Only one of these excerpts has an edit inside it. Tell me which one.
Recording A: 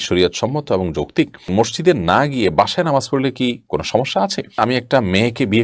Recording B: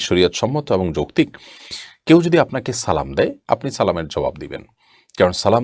A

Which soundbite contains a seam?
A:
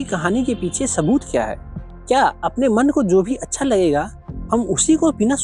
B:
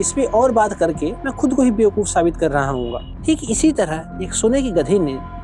B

